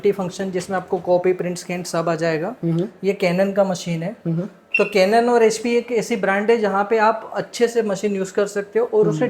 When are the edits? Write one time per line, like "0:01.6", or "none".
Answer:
none